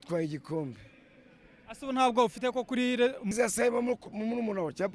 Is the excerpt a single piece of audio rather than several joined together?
no; 1 cut; at 3.3 s

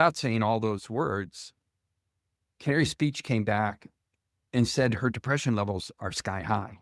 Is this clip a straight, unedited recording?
yes; 0 cuts

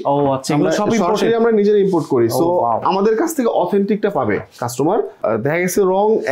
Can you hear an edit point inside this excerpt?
yes; 1 cut; at 5.2 s

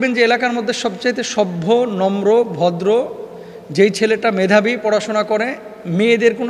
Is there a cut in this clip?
no; 0 cuts

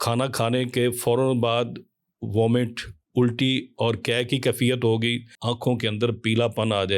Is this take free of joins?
no; 1 cut; at 5.3 s

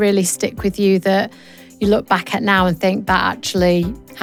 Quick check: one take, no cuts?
yes; 0 cuts

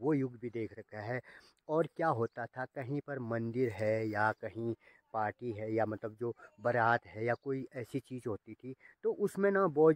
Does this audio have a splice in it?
no; 0 cuts

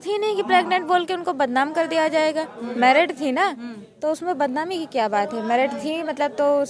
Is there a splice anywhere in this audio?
no; 0 cuts

